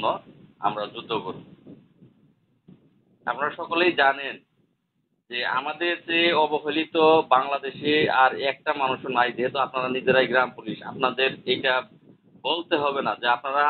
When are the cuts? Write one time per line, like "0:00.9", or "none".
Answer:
none